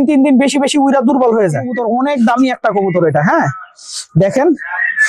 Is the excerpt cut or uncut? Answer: cut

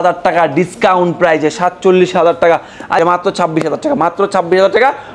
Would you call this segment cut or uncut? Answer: cut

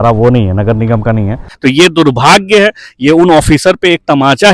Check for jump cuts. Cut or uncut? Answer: cut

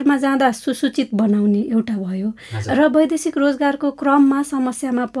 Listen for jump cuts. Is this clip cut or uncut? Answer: uncut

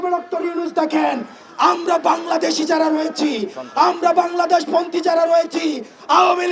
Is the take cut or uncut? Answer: uncut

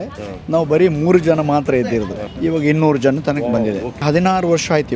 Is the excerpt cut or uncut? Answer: cut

